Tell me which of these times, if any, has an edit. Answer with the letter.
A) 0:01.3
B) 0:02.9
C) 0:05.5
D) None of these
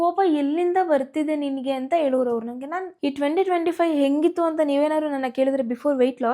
B